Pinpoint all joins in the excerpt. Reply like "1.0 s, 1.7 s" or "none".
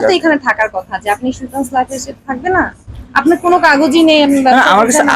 none